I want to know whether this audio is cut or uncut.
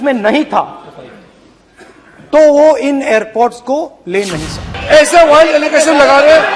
cut